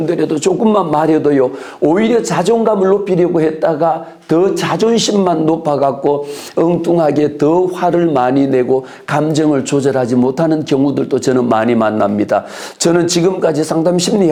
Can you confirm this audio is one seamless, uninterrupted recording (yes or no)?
yes